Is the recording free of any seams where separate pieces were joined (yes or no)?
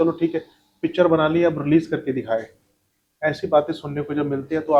yes